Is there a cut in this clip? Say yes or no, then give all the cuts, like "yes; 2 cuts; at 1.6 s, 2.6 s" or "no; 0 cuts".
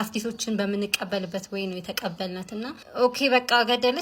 yes; 1 cut; at 2.8 s